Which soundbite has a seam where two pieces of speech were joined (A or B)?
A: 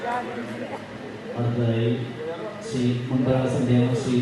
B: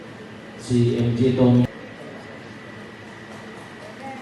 B